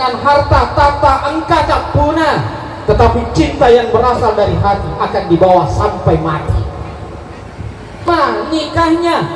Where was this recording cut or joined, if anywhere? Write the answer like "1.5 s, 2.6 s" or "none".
8.1 s